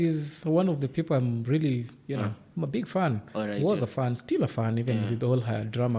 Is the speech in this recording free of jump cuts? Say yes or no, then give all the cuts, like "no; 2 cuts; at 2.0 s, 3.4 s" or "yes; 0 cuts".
yes; 0 cuts